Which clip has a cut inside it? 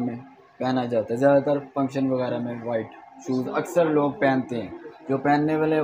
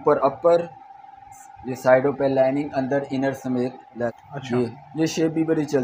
second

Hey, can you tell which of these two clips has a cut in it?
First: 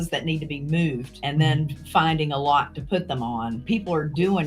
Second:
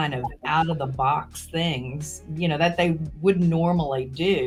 first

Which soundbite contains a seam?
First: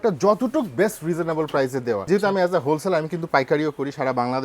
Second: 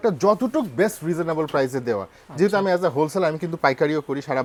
first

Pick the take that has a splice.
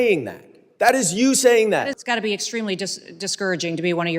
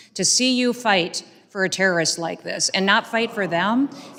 first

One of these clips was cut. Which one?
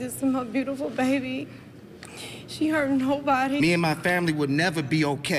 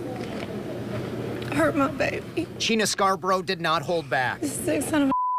first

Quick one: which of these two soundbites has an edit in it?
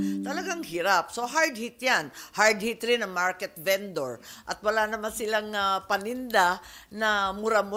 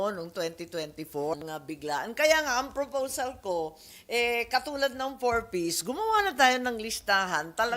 second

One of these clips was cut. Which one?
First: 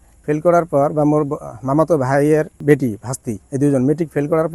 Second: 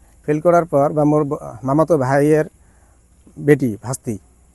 first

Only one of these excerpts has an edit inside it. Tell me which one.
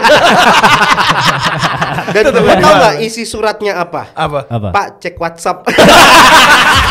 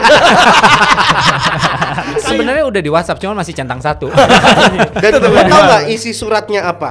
first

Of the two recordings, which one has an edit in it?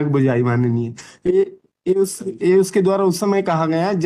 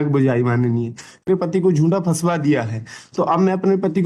second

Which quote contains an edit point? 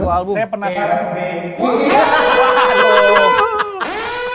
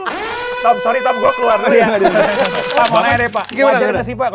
second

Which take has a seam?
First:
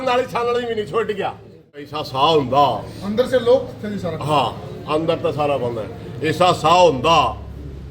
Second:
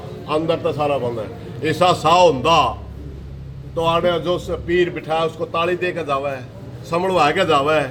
first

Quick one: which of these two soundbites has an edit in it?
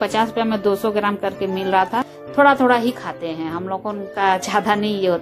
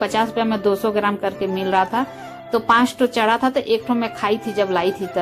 first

